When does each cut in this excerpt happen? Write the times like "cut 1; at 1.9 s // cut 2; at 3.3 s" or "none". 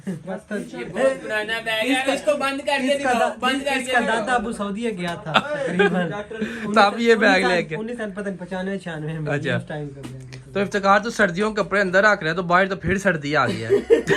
none